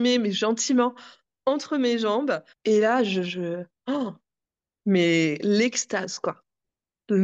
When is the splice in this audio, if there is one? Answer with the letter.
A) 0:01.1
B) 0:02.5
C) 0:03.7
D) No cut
B